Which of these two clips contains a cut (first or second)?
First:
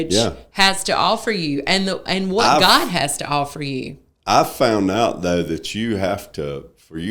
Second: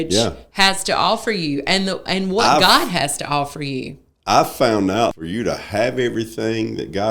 second